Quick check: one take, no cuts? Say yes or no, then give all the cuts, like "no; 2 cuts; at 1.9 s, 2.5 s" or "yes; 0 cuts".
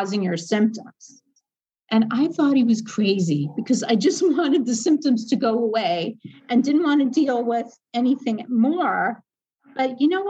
yes; 0 cuts